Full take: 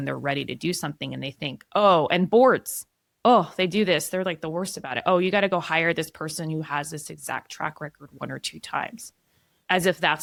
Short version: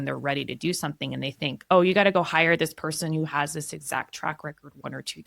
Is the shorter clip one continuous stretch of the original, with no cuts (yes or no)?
no